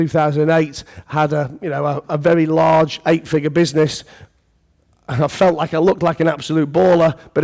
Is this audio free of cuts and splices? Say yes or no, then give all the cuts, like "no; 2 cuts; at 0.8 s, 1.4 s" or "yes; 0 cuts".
yes; 0 cuts